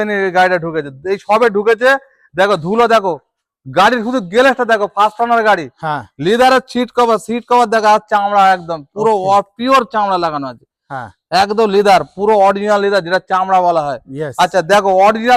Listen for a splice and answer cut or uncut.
uncut